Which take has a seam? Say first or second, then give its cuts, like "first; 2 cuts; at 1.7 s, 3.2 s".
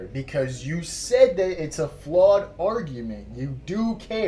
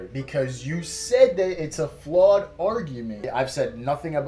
second; 1 cut; at 3.3 s